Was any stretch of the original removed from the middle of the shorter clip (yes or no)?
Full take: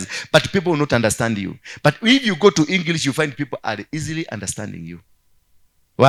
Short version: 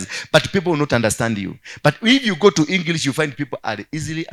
no